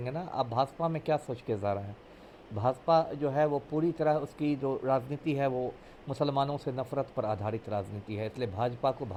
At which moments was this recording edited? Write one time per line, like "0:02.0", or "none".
none